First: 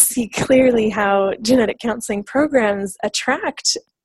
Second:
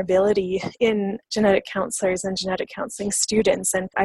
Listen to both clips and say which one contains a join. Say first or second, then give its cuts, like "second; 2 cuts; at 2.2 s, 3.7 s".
second; 1 cut; at 1.2 s